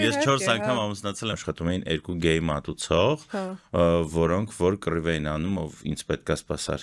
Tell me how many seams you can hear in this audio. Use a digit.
1